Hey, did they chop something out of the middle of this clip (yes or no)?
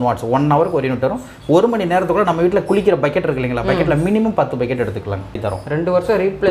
yes